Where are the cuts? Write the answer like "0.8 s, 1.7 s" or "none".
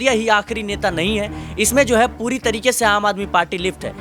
none